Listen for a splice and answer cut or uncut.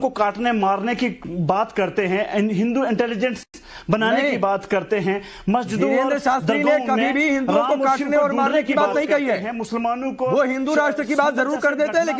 uncut